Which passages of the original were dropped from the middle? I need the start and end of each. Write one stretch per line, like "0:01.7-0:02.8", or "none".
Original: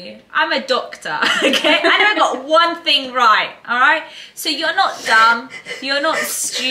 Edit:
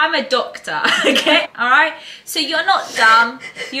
0:01.8-0:03.5